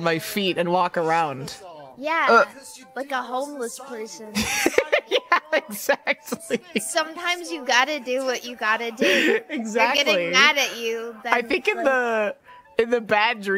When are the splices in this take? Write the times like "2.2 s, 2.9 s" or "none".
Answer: none